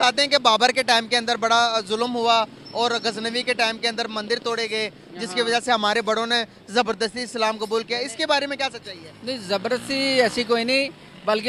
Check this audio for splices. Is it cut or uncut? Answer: uncut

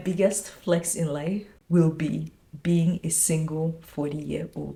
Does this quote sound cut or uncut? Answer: uncut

